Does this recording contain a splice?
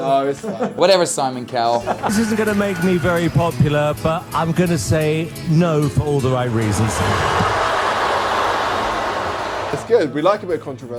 no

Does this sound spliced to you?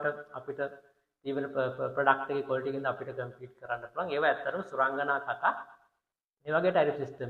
no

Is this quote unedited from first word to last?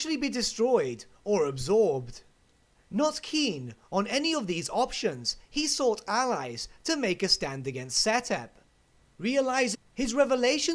yes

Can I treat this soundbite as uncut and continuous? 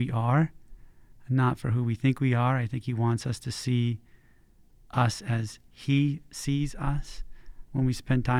yes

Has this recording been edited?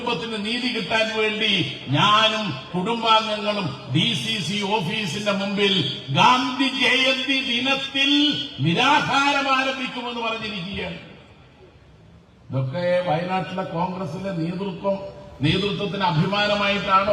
no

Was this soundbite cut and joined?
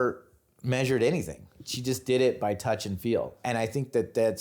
yes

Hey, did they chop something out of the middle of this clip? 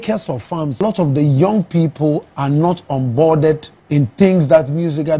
yes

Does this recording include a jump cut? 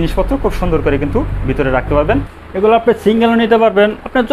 yes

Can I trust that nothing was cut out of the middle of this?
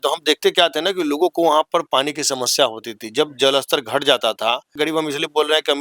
no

